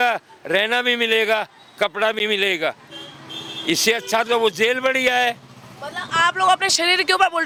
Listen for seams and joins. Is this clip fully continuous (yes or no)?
yes